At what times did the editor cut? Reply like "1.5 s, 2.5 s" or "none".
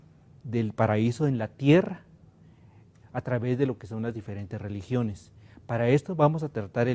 3.5 s